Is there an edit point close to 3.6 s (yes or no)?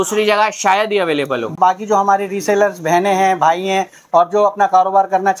no